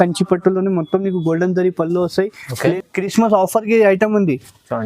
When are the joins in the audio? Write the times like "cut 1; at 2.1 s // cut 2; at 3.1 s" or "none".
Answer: cut 1; at 2.7 s